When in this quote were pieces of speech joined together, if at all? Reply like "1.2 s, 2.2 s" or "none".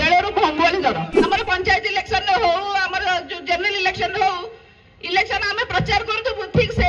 1.1 s